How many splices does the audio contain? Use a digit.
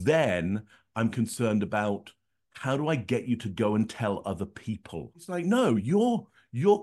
1